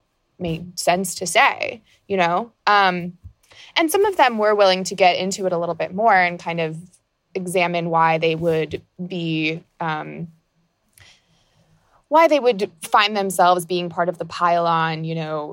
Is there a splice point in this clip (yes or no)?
no